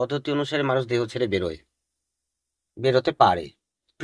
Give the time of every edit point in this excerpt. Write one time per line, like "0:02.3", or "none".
none